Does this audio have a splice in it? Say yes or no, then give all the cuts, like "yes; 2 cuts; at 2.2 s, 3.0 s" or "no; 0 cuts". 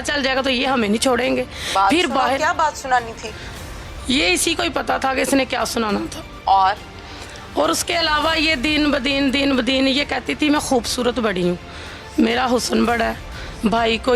no; 0 cuts